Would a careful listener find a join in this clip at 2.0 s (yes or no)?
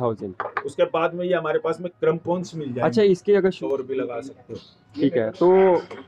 no